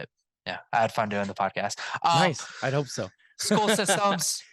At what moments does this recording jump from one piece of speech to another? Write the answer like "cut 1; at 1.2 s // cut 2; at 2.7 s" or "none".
none